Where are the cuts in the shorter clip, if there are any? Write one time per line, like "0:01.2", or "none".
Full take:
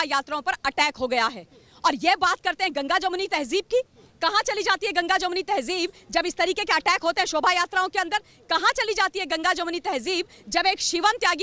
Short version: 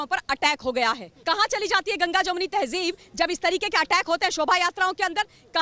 0:01.1

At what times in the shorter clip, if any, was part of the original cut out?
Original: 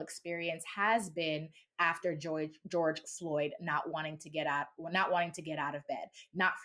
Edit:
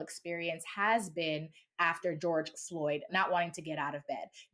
0:02.2
0:03.1

